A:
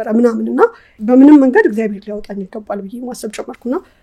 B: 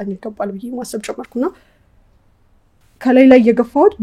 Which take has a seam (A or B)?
A